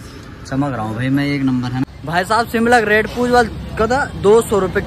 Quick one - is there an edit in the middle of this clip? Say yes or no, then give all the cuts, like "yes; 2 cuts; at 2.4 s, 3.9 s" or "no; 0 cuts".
yes; 1 cut; at 1.9 s